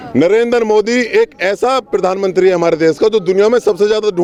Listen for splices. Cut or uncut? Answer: uncut